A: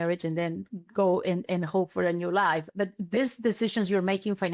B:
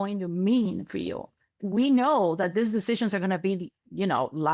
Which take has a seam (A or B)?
B